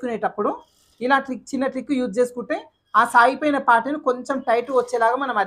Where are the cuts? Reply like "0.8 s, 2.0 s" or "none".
none